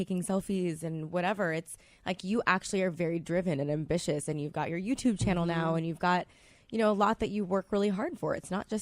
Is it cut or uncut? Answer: cut